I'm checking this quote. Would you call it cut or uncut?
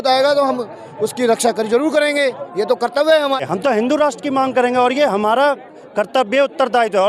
cut